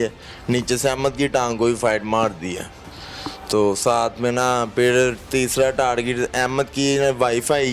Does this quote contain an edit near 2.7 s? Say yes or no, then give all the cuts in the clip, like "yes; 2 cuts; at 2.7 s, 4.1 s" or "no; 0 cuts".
no; 0 cuts